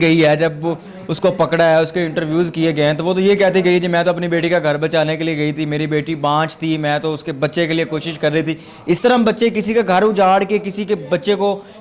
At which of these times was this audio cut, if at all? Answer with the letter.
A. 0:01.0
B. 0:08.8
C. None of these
C